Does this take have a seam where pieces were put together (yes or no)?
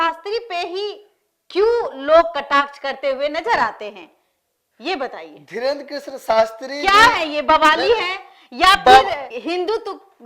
no